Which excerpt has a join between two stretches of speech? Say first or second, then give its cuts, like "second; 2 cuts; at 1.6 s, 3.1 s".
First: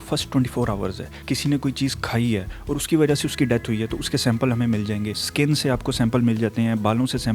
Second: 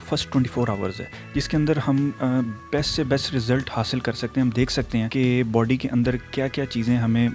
first; 2 cuts; at 1.1 s, 5.1 s